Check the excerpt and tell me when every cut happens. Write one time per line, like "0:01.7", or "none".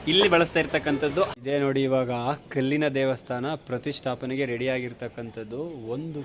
0:01.3